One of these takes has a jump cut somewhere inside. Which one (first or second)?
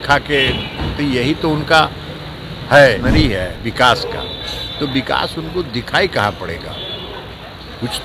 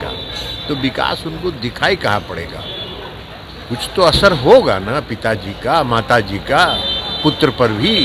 first